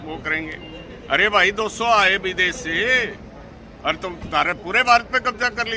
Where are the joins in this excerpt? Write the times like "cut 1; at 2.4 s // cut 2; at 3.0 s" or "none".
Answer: none